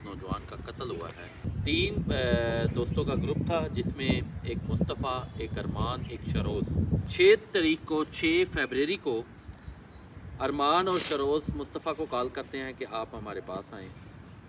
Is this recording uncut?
yes; 0 cuts

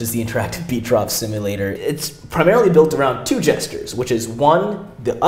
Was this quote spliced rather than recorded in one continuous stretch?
yes; 1 cut; at 1.8 s

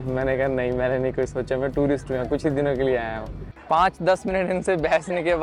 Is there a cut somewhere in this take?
yes; 1 cut; at 3.4 s

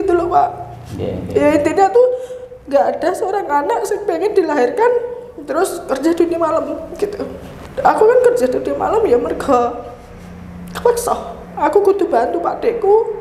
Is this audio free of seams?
yes; 0 cuts

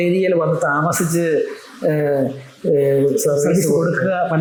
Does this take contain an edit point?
no; 0 cuts

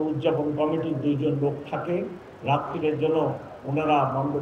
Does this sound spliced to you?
no; 0 cuts

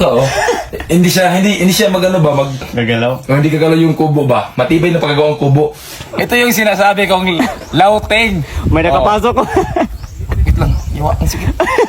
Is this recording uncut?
no; 2 cuts; at 2.7 s, 6.0 s

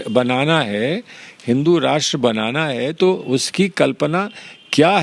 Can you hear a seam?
no; 0 cuts

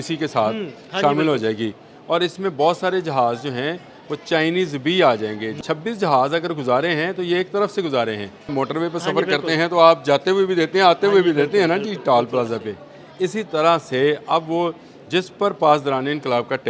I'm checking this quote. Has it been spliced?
yes; 2 cuts; at 5.6 s, 8.5 s

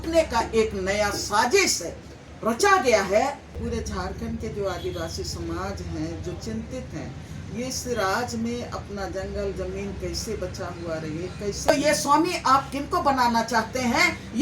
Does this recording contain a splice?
yes; 2 cuts; at 3.6 s, 11.7 s

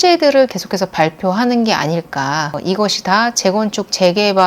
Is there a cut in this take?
yes; 1 cut; at 2.6 s

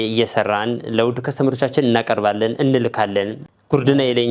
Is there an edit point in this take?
yes; 1 cut; at 3.4 s

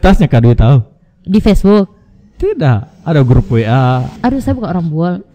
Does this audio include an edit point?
no; 0 cuts

